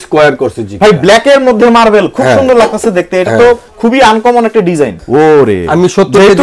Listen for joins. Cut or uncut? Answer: cut